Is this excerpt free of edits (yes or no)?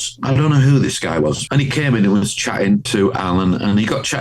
no